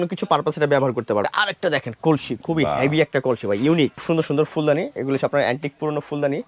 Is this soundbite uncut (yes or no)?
no